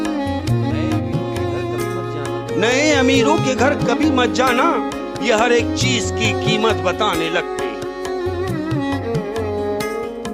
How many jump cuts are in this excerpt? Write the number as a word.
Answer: zero